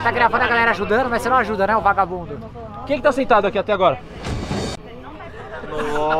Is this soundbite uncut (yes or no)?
yes